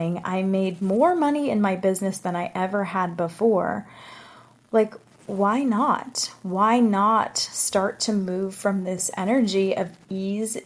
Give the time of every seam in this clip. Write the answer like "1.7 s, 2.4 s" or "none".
9.1 s